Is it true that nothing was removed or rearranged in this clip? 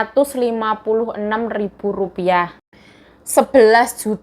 no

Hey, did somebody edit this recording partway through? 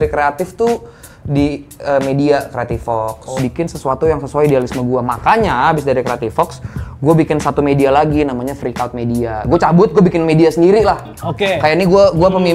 yes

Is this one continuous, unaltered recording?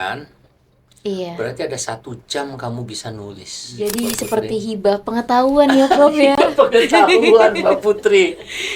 no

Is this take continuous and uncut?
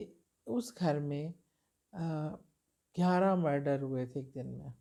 yes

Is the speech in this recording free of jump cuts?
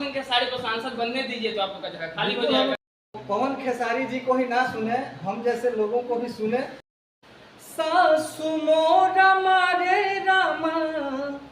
no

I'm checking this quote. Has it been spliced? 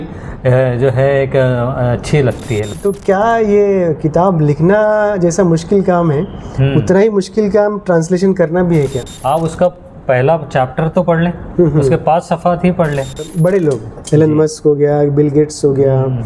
yes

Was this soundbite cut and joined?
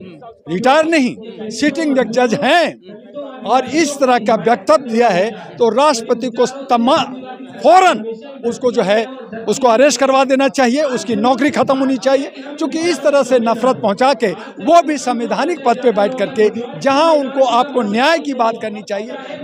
no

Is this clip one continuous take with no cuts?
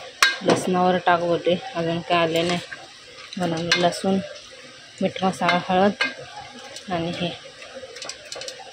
yes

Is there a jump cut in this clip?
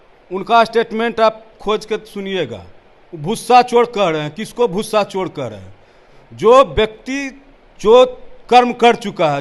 no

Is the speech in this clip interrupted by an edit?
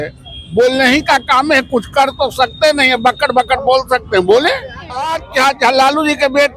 yes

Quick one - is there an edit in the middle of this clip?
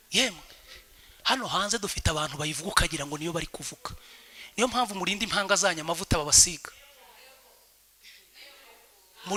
no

